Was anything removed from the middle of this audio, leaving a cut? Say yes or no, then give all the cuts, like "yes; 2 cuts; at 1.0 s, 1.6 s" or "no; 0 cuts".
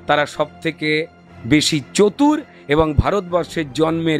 no; 0 cuts